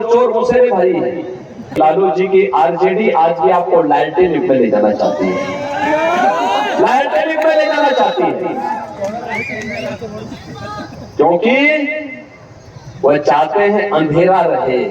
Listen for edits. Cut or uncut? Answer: cut